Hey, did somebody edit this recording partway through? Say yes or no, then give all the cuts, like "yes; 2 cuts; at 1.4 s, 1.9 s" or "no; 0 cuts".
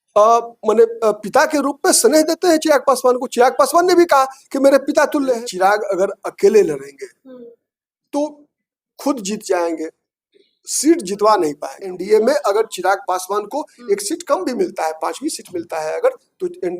yes; 2 cuts; at 5.4 s, 12.0 s